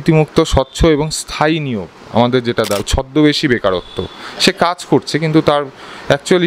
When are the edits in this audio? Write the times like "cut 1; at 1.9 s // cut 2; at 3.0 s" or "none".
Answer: cut 1; at 2.8 s